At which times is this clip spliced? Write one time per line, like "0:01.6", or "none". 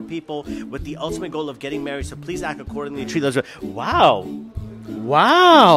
none